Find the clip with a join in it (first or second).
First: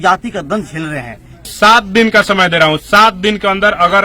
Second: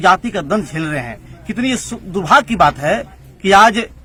first